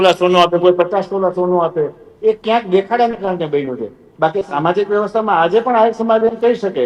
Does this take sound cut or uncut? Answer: uncut